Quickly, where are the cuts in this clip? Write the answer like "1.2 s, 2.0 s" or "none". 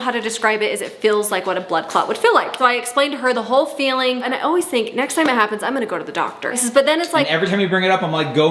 none